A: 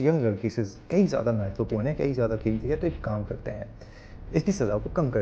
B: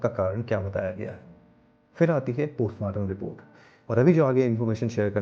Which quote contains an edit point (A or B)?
B